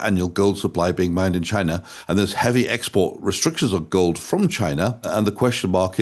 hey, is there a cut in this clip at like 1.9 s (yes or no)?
yes